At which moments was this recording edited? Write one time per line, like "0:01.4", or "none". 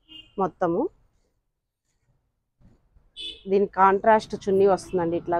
none